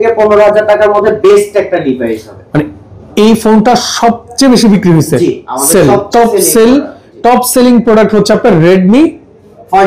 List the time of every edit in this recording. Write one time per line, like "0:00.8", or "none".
none